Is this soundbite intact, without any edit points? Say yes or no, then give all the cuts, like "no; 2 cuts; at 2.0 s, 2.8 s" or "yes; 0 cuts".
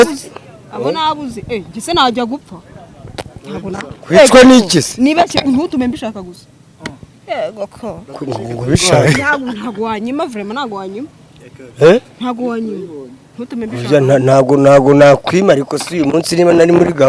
yes; 0 cuts